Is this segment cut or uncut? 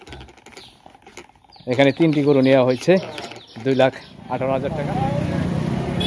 cut